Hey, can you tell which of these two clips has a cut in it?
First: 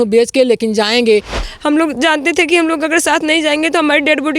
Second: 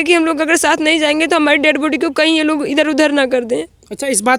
first; 1 cut; at 1.3 s

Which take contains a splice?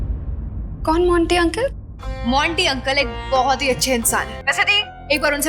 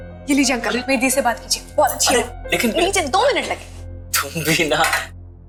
first; 1 cut; at 4.4 s

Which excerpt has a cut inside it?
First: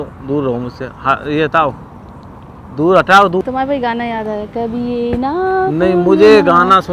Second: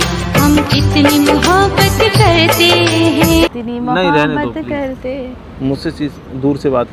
first; 1 cut; at 3.4 s

